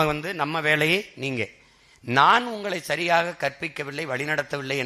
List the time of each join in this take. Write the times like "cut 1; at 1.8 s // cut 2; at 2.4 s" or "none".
none